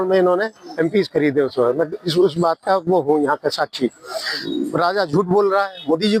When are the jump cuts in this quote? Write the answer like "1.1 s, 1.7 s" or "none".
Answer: 4.4 s